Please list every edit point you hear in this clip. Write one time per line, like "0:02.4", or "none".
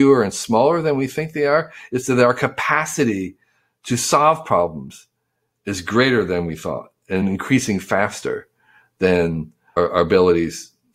0:07.2
0:09.6

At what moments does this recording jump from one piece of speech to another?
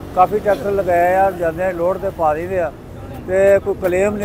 none

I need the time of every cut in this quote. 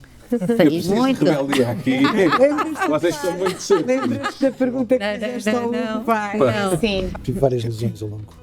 0:07.1

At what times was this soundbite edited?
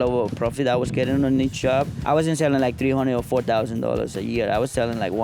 0:02.0

